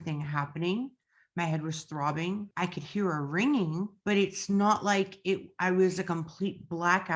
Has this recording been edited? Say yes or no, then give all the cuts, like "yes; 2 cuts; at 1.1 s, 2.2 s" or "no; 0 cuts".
yes; 2 cuts; at 2.5 s, 4.0 s